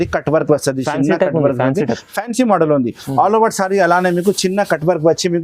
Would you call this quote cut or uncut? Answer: uncut